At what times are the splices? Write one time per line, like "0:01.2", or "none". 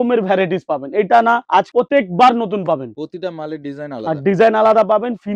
0:01.7
0:03.0